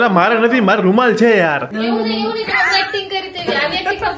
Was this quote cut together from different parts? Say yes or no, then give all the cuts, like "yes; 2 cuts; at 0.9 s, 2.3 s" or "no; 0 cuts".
yes; 1 cut; at 1.7 s